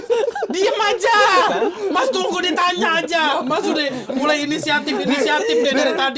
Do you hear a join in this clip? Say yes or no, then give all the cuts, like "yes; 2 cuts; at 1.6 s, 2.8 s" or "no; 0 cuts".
no; 0 cuts